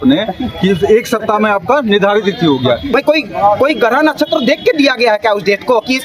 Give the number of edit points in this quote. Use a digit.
1